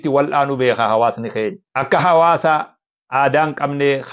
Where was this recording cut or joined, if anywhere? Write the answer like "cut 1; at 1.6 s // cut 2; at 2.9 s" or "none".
cut 1; at 2.1 s